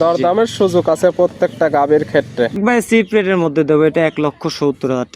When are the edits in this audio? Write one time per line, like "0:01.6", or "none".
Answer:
0:02.6

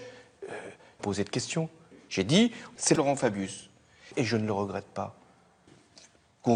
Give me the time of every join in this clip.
none

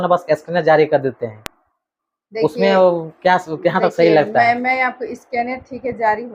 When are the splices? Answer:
none

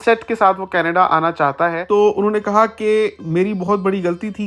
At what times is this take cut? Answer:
0:01.8

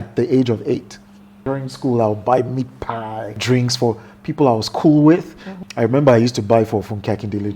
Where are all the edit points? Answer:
0:01.4
0:03.4
0:05.5

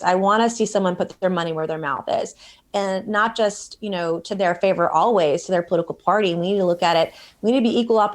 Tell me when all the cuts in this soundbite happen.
none

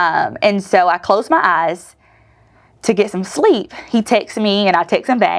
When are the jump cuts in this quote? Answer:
none

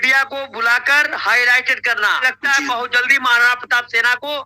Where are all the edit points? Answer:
0:02.2

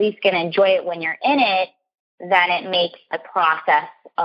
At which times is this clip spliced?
0:03.2

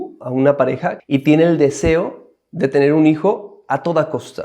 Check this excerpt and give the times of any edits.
0:00.9

